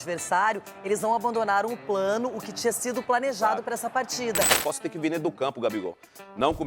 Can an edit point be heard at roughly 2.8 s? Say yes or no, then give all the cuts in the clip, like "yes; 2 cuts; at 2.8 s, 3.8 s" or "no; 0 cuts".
no; 1 cut; at 4.6 s